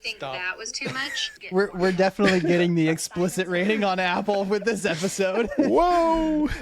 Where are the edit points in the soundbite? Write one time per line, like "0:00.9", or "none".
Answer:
0:01.3